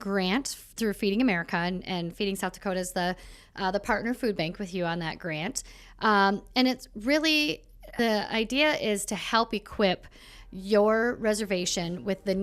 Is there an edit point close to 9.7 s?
no; 1 cut; at 7.8 s

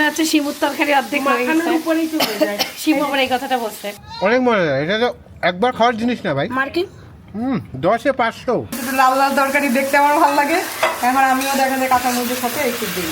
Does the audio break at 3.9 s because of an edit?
yes; 2 cuts; at 3.9 s, 8.8 s

